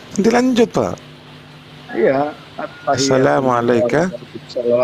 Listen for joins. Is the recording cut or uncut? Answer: uncut